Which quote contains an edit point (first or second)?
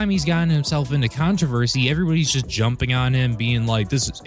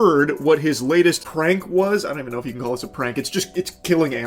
second